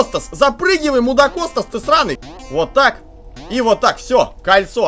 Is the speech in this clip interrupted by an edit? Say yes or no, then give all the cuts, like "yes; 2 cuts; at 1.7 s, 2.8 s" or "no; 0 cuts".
yes; 1 cut; at 2.2 s